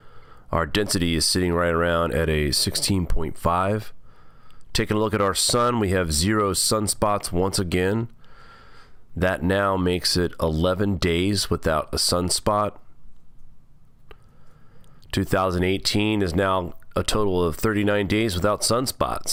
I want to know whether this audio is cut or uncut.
uncut